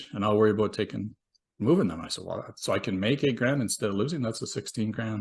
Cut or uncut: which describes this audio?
uncut